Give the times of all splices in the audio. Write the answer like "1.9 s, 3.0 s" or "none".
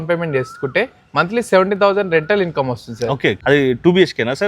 3.4 s